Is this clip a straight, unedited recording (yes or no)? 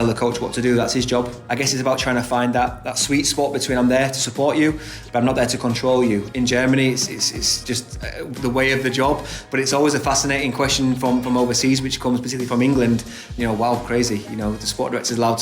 no